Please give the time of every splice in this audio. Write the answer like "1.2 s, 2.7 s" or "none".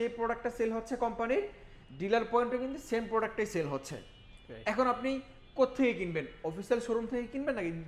none